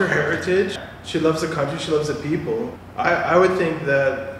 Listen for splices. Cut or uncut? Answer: cut